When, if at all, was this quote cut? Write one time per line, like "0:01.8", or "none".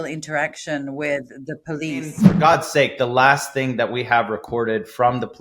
0:02.2